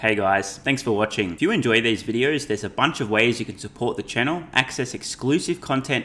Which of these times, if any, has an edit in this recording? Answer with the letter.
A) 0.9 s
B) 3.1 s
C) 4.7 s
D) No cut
A